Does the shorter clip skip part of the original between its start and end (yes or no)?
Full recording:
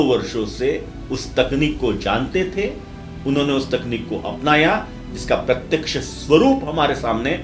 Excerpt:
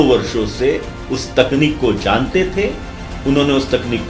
no